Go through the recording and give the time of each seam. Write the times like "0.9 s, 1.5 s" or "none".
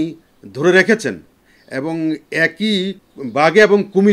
3.0 s